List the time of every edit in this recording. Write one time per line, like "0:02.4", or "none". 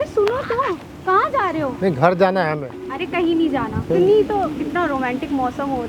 0:03.8